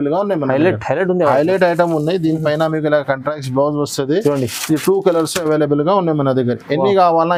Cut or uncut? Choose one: uncut